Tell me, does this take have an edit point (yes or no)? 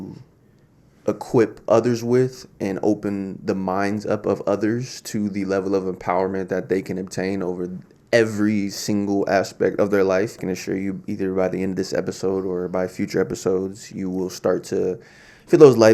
yes